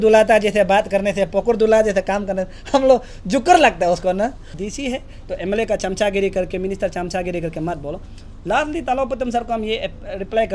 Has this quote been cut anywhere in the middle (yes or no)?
yes